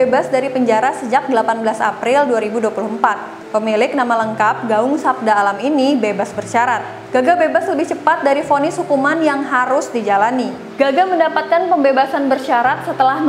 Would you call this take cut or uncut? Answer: uncut